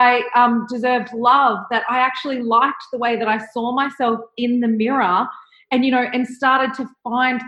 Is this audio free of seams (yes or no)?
yes